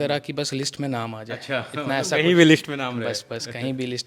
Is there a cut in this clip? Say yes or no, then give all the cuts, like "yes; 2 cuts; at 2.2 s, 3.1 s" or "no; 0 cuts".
no; 0 cuts